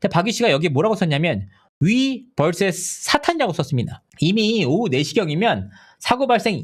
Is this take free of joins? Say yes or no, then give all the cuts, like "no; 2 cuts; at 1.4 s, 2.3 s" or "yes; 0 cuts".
no; 1 cut; at 4.0 s